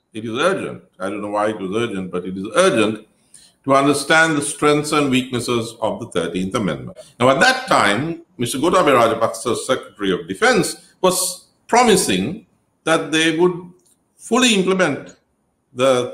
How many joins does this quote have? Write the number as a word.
one